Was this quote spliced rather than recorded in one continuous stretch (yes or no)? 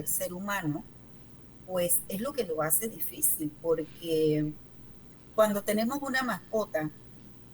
no